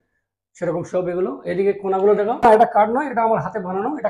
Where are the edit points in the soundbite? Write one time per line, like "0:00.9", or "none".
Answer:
0:02.4